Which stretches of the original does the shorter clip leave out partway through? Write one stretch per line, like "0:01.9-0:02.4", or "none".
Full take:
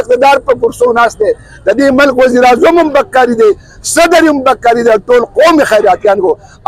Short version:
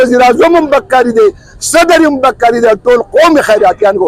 none